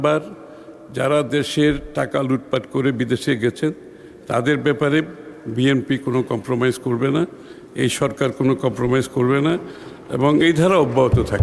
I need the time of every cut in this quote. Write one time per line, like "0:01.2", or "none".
none